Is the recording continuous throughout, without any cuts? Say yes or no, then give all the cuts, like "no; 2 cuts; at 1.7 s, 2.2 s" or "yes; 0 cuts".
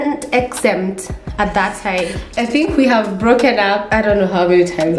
no; 2 cuts; at 2.2 s, 3.9 s